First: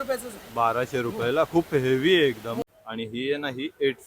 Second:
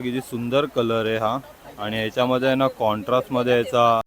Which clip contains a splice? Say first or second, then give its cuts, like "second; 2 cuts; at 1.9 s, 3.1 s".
first; 1 cut; at 2.6 s